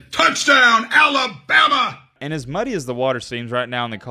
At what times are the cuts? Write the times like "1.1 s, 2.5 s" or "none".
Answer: 2.0 s